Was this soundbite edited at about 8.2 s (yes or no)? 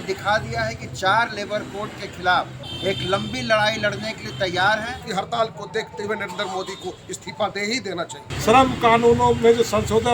yes